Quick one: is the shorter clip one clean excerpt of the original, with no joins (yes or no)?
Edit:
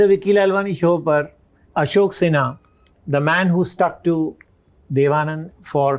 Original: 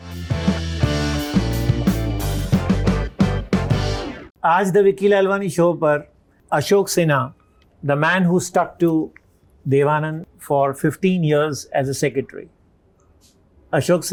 yes